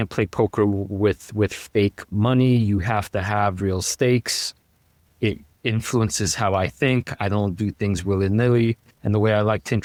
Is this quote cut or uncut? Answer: uncut